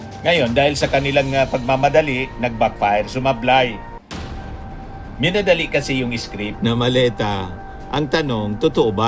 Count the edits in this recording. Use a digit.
1